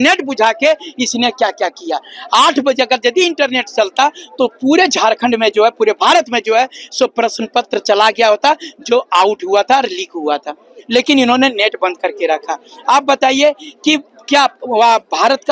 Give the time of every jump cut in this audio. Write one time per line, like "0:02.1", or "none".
none